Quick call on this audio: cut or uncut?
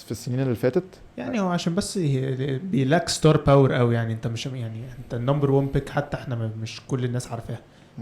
uncut